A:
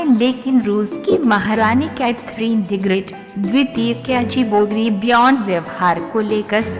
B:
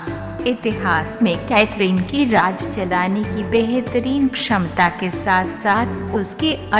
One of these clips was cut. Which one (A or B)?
B